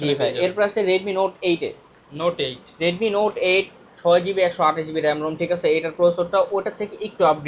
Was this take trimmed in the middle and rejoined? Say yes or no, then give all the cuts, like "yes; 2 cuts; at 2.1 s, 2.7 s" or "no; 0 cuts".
no; 0 cuts